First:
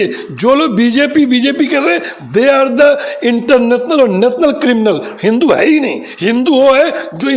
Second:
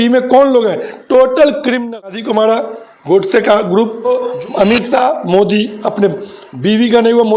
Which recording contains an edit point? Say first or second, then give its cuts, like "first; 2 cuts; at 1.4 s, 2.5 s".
second; 2 cuts; at 2.2 s, 4.1 s